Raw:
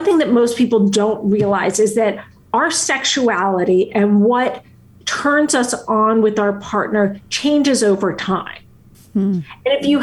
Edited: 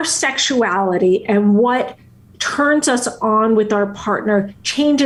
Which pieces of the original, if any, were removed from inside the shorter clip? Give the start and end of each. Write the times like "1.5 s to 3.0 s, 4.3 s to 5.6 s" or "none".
none